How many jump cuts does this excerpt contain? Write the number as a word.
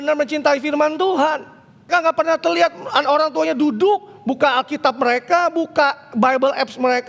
one